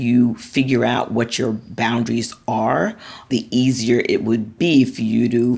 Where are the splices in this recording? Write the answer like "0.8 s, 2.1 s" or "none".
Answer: 3.3 s, 4.6 s